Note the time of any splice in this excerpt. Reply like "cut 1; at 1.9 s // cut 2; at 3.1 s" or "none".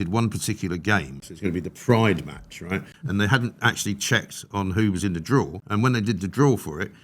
cut 1; at 1.2 s // cut 2; at 3.0 s // cut 3; at 5.6 s

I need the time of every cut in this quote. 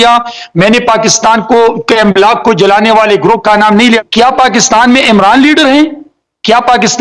cut 1; at 4.0 s

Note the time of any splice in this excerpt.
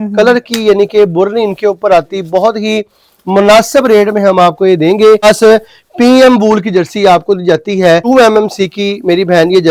cut 1; at 5.2 s // cut 2; at 8.0 s

